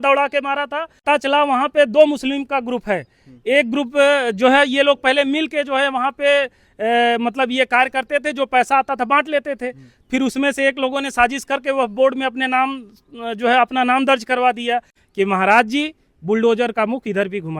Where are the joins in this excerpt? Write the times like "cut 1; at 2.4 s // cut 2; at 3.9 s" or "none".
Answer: cut 1; at 1.0 s // cut 2; at 15.0 s